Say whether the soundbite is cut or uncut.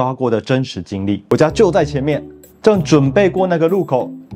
cut